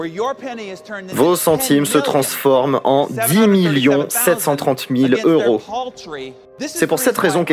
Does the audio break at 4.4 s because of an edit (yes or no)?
no